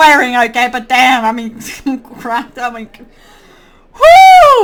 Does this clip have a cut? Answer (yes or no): no